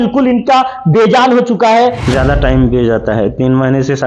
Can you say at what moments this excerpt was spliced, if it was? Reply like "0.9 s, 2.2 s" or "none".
2.0 s